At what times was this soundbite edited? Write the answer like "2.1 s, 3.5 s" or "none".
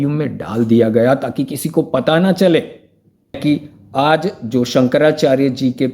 3.4 s